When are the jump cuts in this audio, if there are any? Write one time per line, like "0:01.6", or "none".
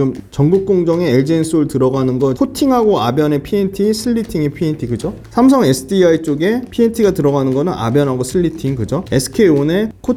none